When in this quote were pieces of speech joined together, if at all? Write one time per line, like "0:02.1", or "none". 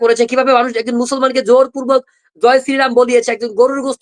none